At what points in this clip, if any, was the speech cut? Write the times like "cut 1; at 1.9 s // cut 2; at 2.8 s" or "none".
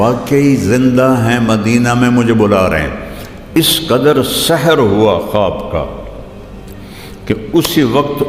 none